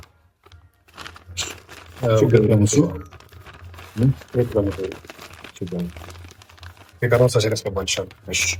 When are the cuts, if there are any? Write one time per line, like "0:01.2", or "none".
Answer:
none